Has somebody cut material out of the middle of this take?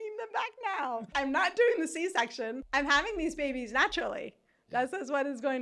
yes; 2 cuts; at 1.1 s, 2.6 s

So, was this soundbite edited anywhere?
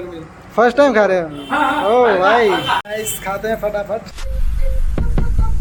no; 0 cuts

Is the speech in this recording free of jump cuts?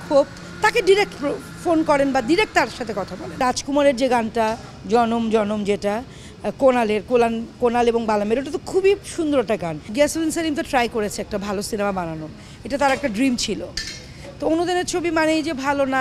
no; 2 cuts; at 3.4 s, 9.9 s

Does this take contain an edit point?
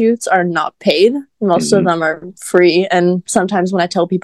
no; 0 cuts

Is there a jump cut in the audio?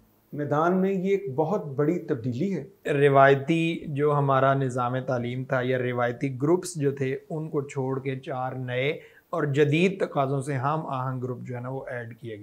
yes; 1 cut; at 2.8 s

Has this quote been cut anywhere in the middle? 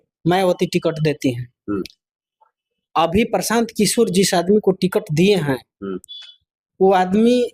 no; 0 cuts

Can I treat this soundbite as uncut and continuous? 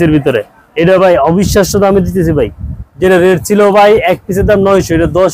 yes; 0 cuts

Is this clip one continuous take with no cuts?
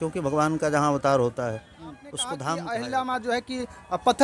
no; 1 cut; at 2.4 s

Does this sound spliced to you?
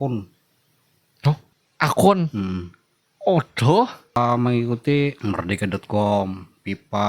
yes; 3 cuts; at 1.6 s, 4.2 s, 5.2 s

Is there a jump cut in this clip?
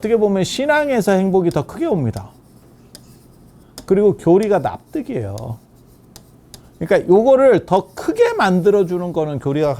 no; 0 cuts

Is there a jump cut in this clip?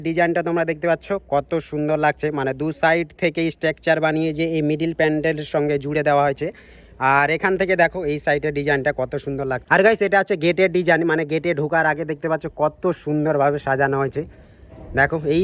no; 0 cuts

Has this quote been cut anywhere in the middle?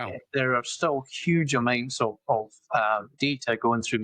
yes; 1 cut; at 3.1 s

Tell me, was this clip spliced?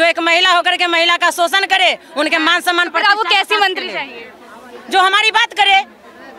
no; 0 cuts

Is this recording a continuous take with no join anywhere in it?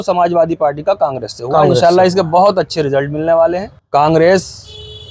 no; 1 cut; at 3.7 s

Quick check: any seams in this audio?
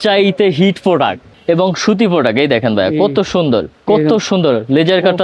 yes; 2 cuts; at 1.3 s, 3.7 s

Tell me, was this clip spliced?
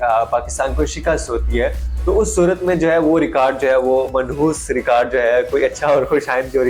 no; 0 cuts

